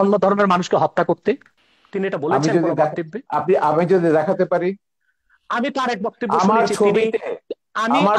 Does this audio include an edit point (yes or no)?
no